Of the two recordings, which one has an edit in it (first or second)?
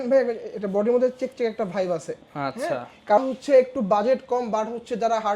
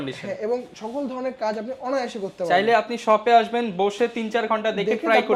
first